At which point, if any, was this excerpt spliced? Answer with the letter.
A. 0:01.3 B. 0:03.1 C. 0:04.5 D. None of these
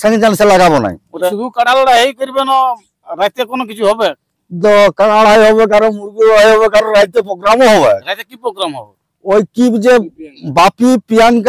A